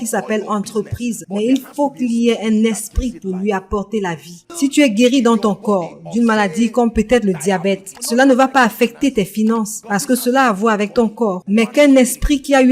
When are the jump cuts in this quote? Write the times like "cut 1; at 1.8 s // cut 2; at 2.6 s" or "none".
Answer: cut 1; at 4.4 s // cut 2; at 7.9 s // cut 3; at 9.8 s // cut 4; at 11.4 s